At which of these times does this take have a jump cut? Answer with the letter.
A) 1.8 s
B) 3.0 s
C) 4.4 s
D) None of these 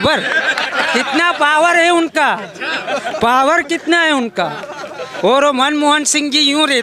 D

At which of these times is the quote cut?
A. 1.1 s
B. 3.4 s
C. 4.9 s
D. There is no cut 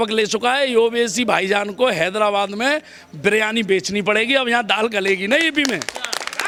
D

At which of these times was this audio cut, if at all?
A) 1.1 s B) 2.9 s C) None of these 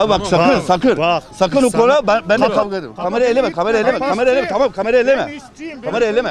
B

